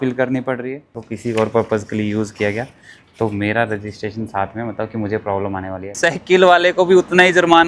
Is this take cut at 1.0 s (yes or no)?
yes